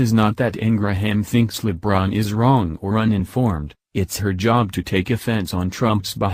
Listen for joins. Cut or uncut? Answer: uncut